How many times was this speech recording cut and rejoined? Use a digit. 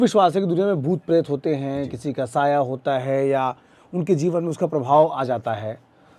0